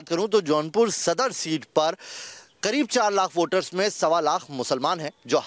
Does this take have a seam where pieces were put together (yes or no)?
no